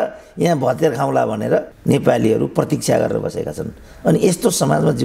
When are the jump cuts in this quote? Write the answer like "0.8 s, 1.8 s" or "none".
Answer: none